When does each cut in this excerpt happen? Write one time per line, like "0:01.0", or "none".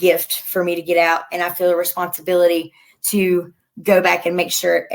none